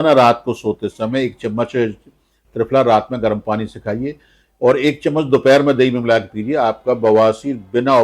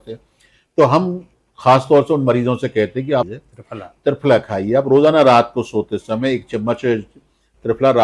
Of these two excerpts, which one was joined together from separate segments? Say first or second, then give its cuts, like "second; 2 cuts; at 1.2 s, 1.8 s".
second; 1 cut; at 3.3 s